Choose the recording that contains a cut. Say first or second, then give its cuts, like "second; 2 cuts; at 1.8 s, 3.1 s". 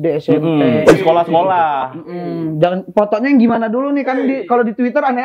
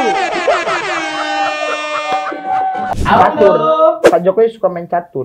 second; 1 cut; at 3.0 s